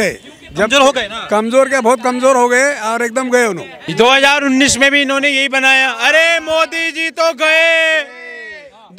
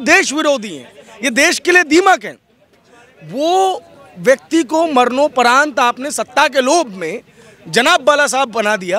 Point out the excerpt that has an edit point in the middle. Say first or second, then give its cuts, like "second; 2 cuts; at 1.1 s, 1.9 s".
first; 1 cut; at 3.8 s